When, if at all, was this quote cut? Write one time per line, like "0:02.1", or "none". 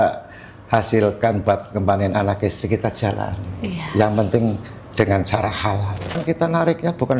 0:06.2